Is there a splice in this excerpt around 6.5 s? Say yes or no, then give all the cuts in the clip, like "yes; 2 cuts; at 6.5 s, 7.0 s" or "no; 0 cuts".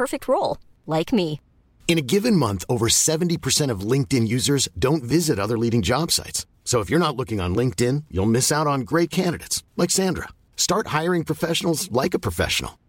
no; 0 cuts